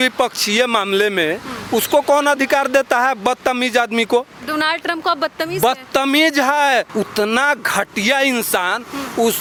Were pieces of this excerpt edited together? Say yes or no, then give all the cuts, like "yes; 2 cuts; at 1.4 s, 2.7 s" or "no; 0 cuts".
no; 0 cuts